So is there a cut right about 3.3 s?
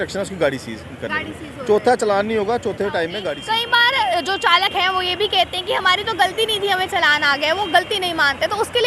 yes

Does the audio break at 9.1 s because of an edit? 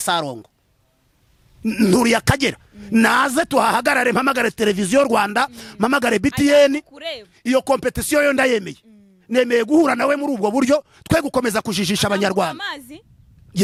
no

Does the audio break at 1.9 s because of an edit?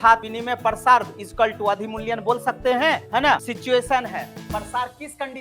no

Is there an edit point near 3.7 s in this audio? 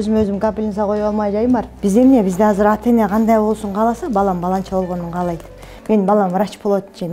no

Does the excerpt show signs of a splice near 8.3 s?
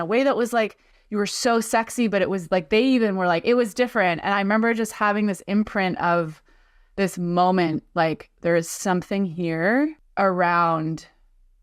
no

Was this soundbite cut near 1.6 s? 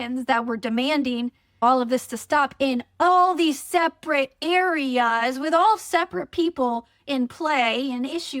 yes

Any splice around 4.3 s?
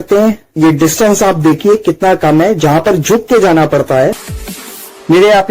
yes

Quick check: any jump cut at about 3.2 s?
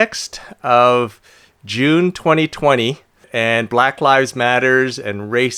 yes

